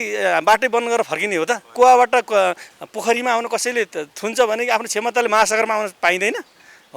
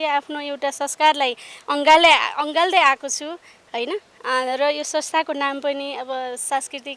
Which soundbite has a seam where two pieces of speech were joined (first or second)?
first